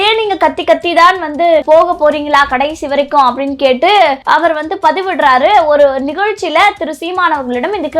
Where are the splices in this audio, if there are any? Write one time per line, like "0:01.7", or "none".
0:01.6
0:04.2